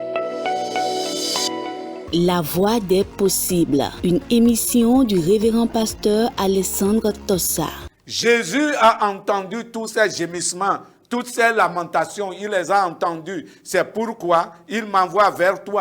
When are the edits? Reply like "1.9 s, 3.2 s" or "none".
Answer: 1.8 s